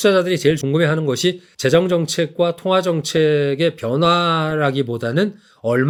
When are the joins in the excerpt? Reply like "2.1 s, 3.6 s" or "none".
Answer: none